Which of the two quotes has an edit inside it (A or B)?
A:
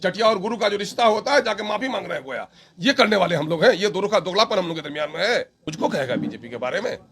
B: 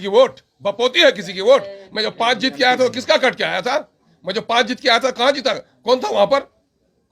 A